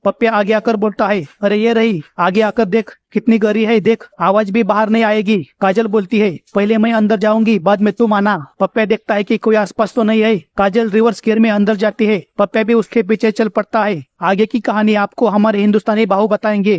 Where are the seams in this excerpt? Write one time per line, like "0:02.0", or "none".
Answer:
none